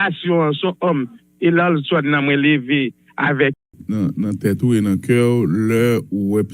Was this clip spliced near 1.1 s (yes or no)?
no